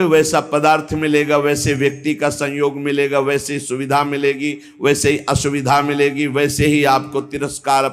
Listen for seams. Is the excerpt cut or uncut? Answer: uncut